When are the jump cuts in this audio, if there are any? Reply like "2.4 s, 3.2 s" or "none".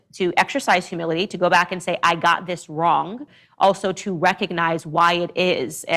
3.3 s